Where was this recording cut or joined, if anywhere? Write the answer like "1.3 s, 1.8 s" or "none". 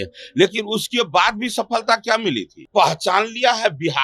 2.5 s